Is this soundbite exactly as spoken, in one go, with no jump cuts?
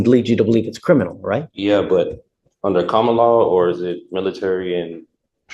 no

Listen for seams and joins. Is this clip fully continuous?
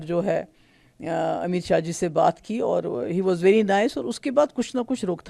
yes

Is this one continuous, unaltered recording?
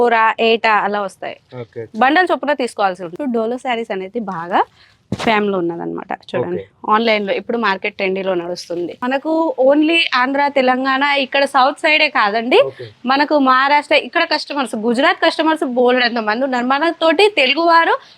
no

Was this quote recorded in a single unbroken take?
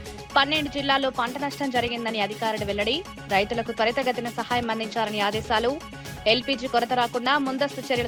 yes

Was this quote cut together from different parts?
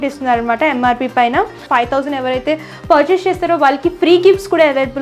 yes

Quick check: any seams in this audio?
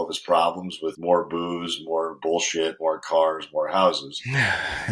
yes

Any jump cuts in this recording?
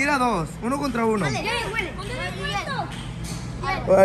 no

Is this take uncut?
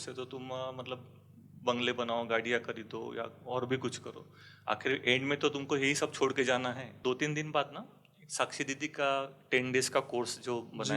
no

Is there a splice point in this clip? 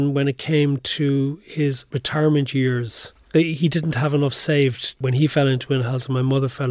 yes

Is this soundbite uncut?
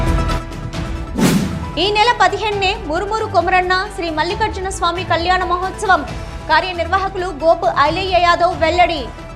yes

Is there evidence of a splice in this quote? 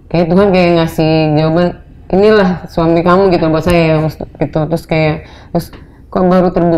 no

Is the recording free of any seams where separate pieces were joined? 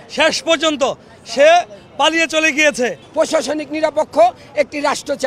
no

